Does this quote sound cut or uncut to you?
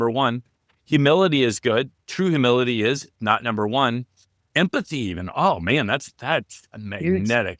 cut